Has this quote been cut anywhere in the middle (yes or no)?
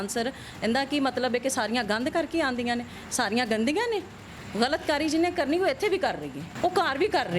yes